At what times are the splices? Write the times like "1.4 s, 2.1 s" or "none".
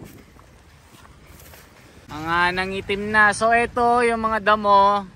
2.1 s

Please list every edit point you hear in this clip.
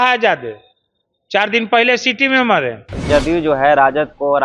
3.0 s

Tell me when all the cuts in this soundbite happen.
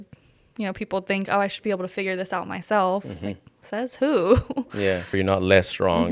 5.2 s

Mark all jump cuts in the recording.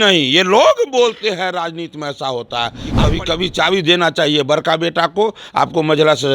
2.8 s

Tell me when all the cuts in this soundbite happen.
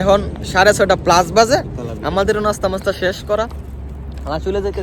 none

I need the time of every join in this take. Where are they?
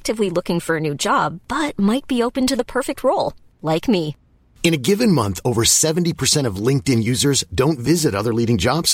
none

